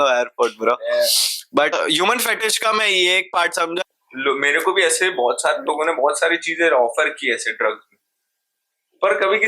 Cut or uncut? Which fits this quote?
cut